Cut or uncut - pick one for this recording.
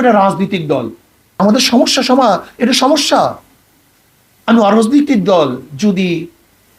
cut